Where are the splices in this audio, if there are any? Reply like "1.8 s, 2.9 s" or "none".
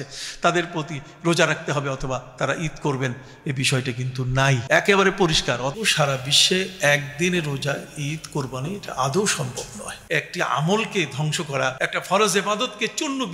4.6 s, 5.7 s, 9.9 s, 11.8 s